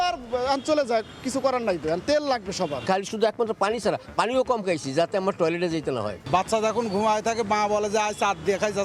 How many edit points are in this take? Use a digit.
2